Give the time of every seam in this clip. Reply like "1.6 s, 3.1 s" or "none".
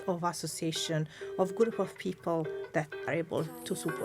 3.1 s